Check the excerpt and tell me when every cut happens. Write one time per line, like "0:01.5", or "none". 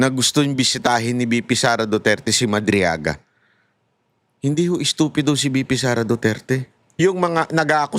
0:07.0